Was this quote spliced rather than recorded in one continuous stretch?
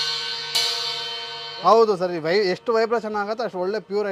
no; 0 cuts

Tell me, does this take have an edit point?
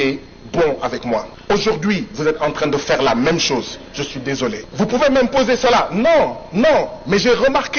yes; 2 cuts; at 1.3 s, 4.7 s

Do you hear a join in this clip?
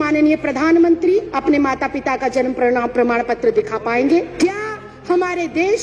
yes; 2 cuts; at 1.3 s, 4.3 s

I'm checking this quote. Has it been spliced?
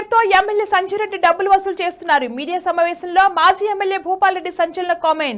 no; 0 cuts

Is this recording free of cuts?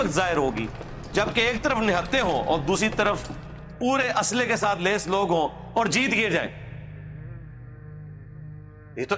yes; 0 cuts

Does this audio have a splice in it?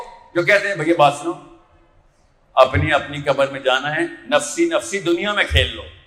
no; 0 cuts

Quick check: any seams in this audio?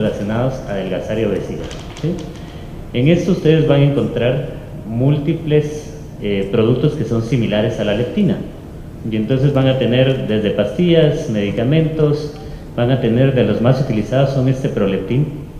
yes; 1 cut; at 10.3 s

